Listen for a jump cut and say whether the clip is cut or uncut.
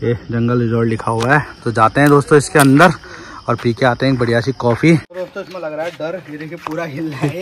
cut